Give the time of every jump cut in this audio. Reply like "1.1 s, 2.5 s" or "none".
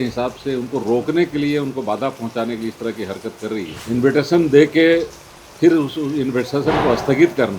3.7 s